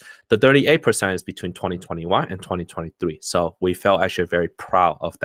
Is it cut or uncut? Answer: uncut